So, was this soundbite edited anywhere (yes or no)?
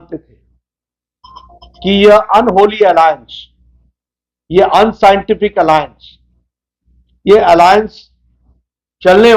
no